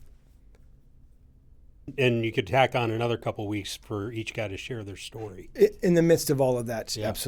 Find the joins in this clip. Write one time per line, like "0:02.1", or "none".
0:01.9